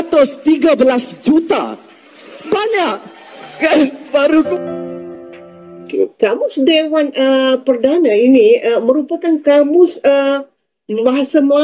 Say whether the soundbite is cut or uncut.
cut